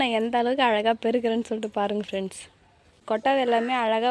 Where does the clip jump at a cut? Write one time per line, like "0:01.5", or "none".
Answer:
0:03.2